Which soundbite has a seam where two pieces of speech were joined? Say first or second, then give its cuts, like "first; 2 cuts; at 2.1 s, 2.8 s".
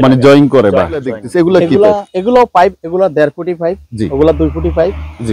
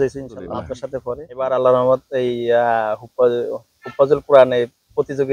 first; 1 cut; at 1.2 s